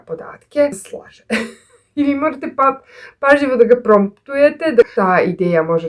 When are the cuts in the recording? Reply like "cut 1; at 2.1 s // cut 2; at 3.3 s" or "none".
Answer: cut 1; at 0.9 s // cut 2; at 4.9 s